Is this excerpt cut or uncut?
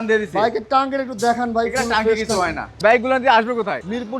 cut